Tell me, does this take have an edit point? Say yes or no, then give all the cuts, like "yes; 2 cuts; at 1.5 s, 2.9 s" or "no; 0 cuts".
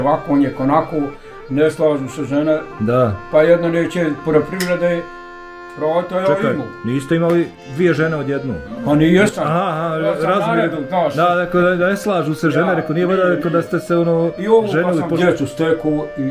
yes; 1 cut; at 15.1 s